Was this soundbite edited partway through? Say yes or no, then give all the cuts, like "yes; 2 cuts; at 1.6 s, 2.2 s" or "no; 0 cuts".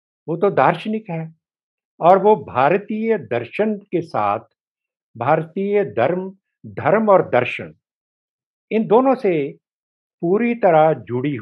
no; 0 cuts